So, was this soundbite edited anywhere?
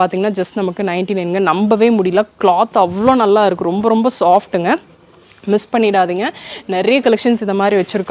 no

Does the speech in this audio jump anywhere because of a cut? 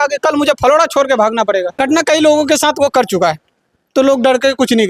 yes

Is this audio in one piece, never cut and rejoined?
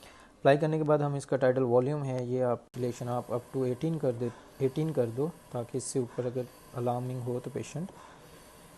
no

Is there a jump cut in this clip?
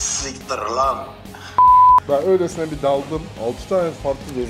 yes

